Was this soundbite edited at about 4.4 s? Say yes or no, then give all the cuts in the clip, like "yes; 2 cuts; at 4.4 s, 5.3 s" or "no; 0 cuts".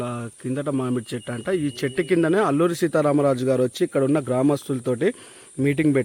no; 0 cuts